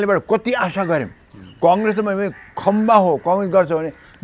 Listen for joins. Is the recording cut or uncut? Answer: uncut